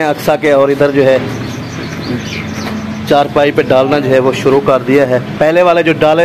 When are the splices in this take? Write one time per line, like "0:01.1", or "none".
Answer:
none